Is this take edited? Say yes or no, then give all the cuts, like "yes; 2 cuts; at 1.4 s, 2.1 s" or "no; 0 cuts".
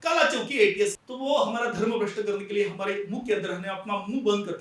yes; 1 cut; at 1.0 s